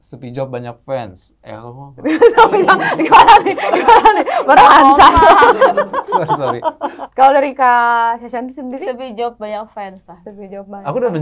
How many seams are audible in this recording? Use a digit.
0